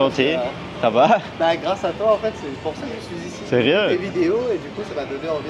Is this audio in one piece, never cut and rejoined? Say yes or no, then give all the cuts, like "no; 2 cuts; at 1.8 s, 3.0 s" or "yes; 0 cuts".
yes; 0 cuts